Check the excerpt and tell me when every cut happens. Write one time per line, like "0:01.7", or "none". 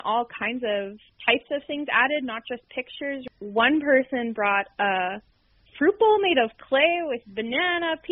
0:01.0
0:03.2